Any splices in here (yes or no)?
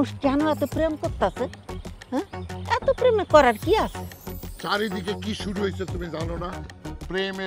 no